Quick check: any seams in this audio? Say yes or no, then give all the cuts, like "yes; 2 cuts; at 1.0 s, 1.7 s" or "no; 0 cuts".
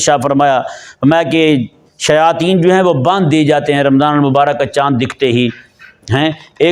no; 0 cuts